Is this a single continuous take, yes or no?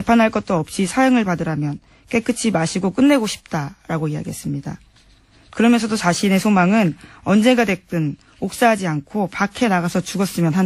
no